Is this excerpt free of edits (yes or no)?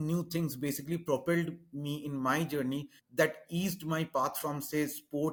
yes